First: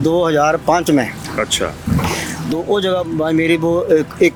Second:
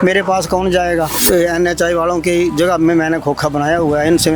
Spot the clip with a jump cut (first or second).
second